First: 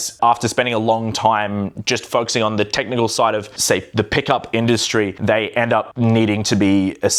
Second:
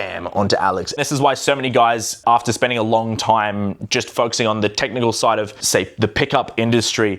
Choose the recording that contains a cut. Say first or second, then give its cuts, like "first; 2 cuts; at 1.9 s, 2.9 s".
second; 1 cut; at 0.9 s